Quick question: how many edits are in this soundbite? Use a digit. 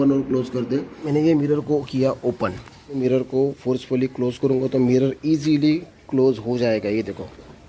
2